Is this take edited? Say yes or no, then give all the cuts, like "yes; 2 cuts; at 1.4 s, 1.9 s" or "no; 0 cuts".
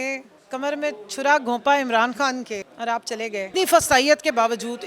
yes; 2 cuts; at 2.7 s, 3.5 s